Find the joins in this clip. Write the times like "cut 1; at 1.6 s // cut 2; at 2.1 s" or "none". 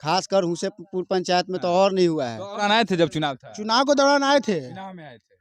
cut 1; at 2.6 s